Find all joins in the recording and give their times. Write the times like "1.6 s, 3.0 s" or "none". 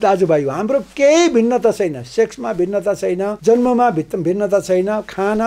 3.4 s